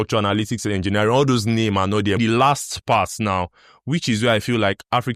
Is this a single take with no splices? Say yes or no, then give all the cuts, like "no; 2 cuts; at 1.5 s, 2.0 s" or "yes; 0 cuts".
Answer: no; 1 cut; at 2.2 s